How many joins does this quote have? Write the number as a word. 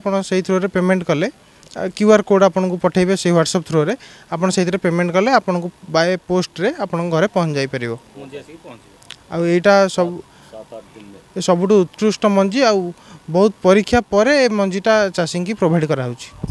zero